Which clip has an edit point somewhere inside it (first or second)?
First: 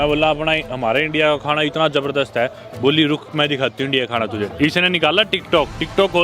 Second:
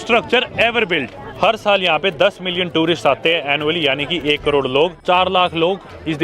second